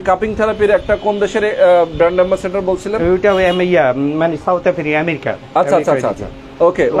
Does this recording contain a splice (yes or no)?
no